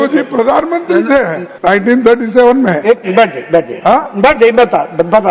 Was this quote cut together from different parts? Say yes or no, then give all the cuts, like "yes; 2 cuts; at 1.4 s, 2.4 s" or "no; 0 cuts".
yes; 1 cut; at 1.4 s